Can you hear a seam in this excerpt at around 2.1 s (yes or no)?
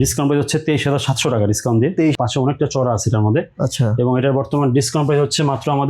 yes